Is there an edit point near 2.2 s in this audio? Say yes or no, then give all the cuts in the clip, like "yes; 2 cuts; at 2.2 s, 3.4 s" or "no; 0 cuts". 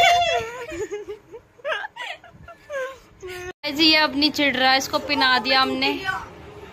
no; 1 cut; at 3.5 s